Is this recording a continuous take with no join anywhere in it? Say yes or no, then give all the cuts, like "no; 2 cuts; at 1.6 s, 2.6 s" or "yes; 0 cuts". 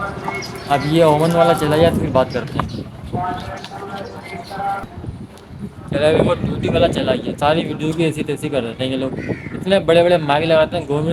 yes; 0 cuts